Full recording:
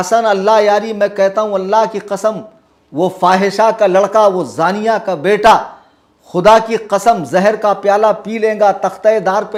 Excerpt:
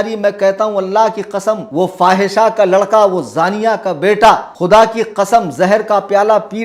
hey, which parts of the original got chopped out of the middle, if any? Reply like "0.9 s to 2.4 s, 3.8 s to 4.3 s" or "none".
2.4 s to 2.9 s, 5.7 s to 6.3 s